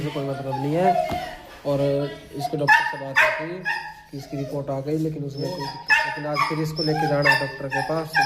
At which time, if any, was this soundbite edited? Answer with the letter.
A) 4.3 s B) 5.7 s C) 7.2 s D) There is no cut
B